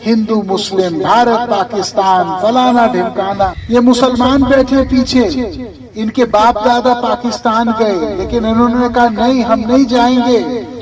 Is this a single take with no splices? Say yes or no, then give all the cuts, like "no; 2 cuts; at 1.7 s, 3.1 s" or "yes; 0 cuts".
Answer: no; 1 cut; at 3.6 s